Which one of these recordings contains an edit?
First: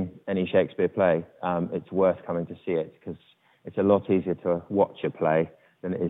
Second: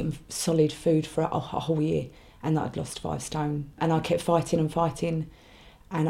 second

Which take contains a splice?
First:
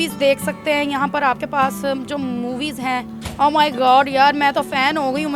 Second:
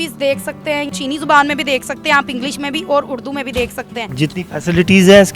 second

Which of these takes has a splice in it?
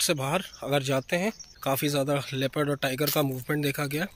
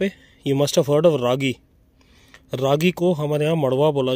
first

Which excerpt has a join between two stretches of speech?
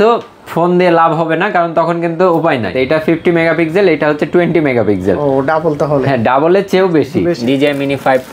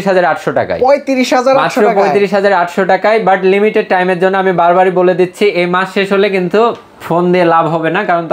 first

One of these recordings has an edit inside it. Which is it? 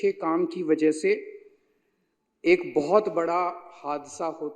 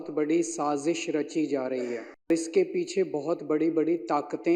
second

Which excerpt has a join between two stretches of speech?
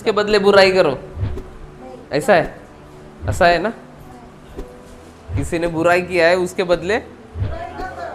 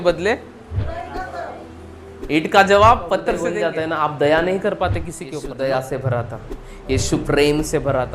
second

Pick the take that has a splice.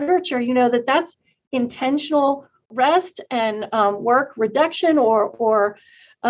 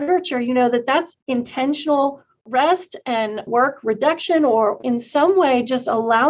second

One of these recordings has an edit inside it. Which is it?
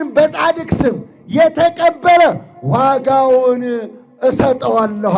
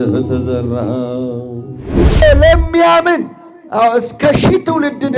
second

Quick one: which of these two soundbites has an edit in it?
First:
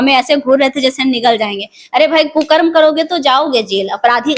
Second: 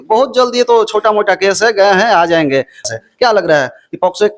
second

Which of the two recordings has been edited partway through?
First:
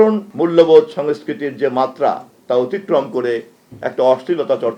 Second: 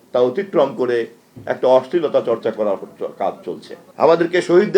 second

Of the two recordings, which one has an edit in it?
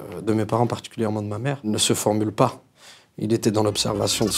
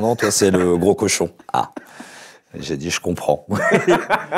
first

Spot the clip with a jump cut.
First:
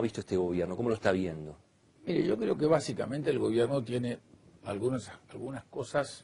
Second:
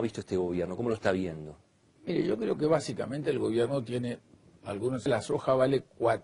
first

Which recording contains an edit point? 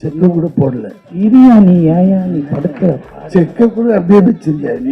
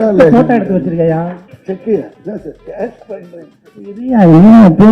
second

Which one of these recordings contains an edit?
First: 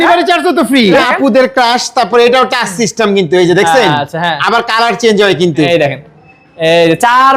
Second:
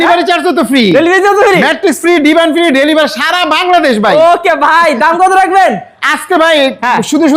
first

